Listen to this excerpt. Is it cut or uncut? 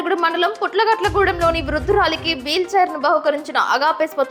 uncut